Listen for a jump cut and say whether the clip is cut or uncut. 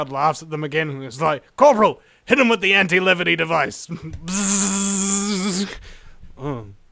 cut